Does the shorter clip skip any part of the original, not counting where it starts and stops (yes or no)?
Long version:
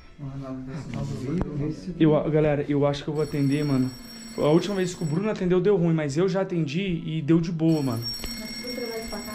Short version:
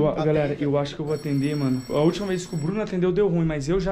yes